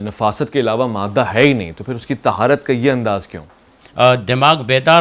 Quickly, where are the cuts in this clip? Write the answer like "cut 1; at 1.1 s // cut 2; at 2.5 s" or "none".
cut 1; at 3.8 s